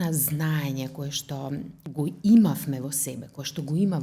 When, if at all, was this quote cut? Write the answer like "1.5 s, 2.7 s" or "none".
1.8 s